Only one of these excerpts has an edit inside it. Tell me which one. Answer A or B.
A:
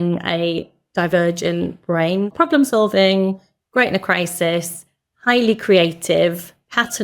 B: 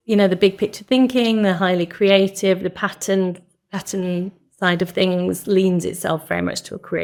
A